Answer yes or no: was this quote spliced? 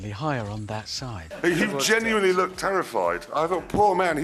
yes